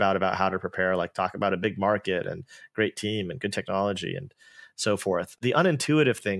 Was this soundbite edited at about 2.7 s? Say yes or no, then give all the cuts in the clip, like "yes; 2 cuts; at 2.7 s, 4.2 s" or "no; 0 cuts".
no; 1 cut; at 5.4 s